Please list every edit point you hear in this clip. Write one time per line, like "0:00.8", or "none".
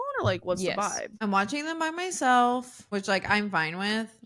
0:01.1
0:02.8